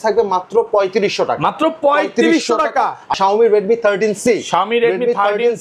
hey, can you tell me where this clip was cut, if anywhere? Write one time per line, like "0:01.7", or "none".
0:03.1